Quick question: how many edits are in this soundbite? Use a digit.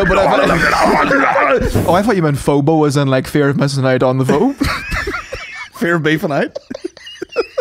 1